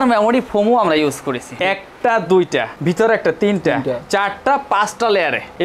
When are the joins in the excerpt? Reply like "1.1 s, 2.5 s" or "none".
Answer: 1.5 s